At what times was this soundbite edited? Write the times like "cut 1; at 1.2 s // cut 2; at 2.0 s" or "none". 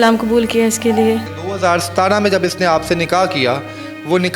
cut 1; at 1.4 s